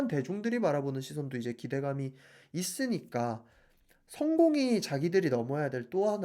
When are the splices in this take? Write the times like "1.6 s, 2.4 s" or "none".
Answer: none